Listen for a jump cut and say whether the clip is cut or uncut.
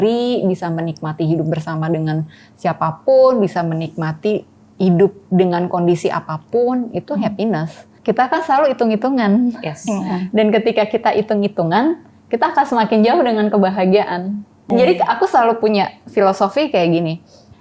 cut